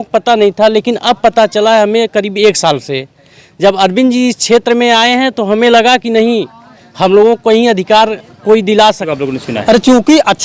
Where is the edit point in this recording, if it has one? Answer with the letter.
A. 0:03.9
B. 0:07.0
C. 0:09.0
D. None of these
C